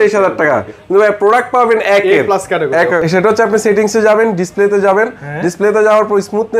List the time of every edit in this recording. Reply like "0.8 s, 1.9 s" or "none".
3.0 s